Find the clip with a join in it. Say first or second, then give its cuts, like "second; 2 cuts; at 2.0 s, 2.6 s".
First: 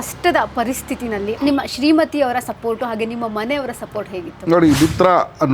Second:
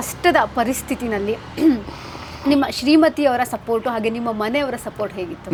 first; 1 cut; at 1.3 s